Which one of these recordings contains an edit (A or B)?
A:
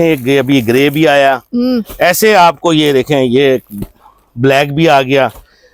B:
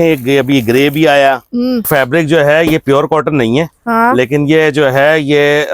B